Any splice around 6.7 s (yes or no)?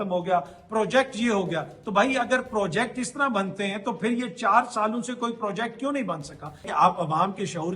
yes